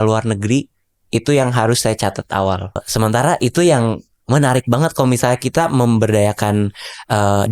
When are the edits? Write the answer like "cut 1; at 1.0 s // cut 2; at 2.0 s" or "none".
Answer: cut 1; at 2.8 s

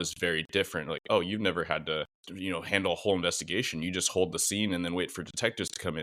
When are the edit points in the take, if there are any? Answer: cut 1; at 2.2 s

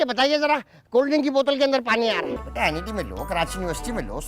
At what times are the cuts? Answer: cut 1; at 2.3 s

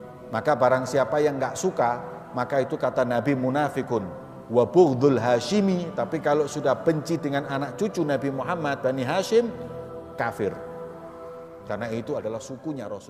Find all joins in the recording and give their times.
none

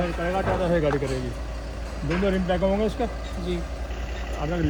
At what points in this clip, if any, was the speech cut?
none

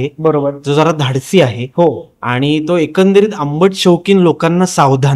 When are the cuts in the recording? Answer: none

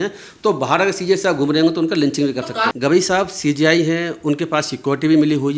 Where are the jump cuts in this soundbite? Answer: cut 1; at 2.7 s

